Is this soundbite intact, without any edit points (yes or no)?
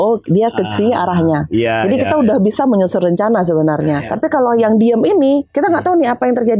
no